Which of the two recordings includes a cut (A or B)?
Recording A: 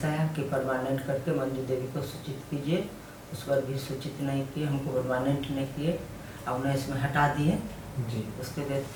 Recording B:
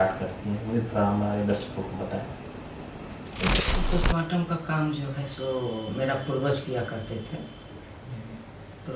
B